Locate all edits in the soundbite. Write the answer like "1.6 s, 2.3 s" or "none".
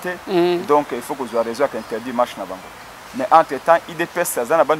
none